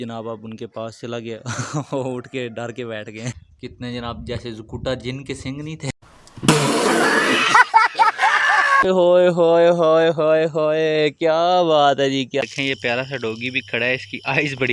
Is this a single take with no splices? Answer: no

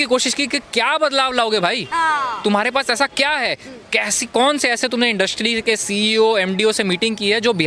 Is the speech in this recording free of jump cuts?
yes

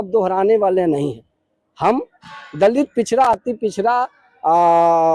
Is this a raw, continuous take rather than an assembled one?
yes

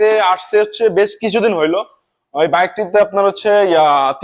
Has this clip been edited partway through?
no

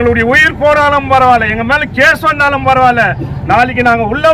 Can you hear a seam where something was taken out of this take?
no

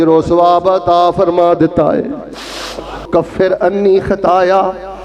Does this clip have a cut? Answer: yes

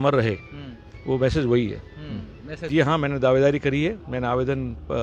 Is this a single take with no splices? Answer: no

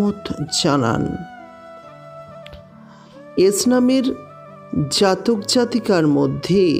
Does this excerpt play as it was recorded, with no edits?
no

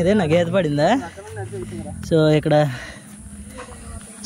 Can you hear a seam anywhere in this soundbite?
no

